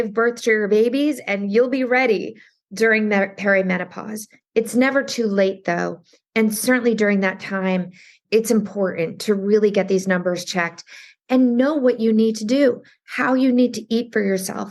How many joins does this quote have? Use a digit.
1